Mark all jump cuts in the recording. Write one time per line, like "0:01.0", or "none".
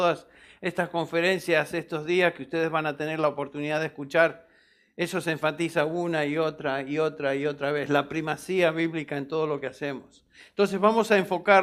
none